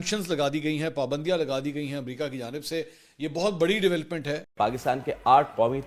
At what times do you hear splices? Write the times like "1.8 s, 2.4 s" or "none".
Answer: 4.4 s

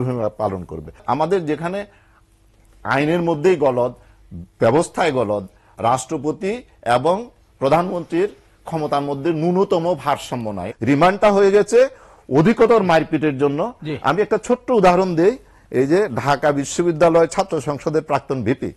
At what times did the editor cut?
1.0 s, 10.7 s

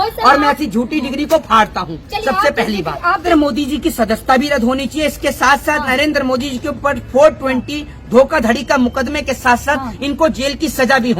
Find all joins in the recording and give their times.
3.3 s

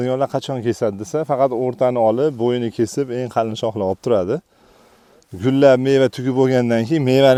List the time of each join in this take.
none

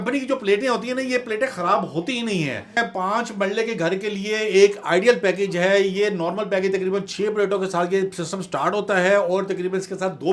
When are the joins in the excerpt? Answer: 2.8 s

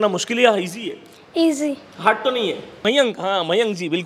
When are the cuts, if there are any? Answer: 2.7 s

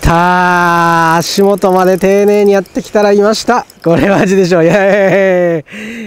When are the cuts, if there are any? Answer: 3.7 s

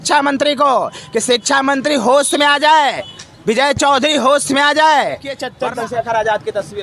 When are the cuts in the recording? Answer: 5.5 s

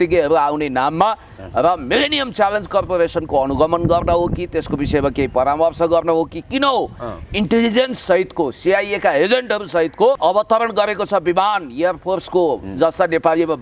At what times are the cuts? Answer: 10.2 s

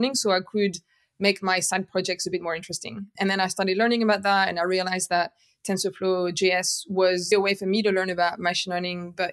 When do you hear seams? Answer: 3.1 s, 7.3 s

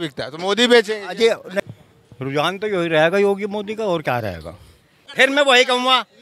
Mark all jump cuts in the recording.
1.5 s, 5.0 s

